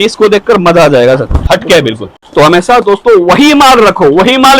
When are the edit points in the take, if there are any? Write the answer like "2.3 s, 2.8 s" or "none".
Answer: 1.4 s, 2.1 s